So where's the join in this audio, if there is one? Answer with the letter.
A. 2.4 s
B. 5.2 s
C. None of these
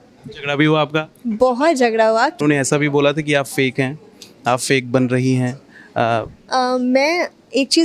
A